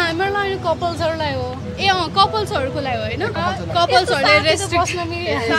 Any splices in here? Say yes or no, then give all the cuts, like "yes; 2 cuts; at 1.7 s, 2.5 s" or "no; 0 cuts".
no; 0 cuts